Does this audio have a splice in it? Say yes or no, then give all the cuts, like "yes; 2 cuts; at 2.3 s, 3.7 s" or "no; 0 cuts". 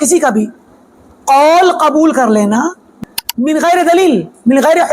yes; 1 cut; at 2.9 s